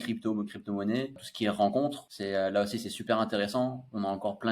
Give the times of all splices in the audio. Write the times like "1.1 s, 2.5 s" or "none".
1.3 s, 2.1 s